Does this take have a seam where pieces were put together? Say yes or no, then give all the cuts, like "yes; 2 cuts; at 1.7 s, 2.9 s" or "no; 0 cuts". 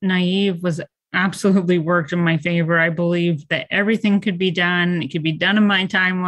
no; 0 cuts